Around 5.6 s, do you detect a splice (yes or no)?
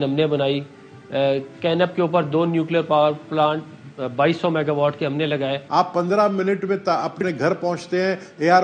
yes